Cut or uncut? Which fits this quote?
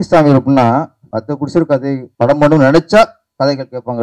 cut